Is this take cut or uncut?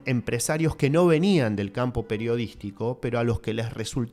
uncut